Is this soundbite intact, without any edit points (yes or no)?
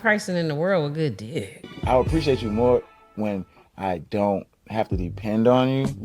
no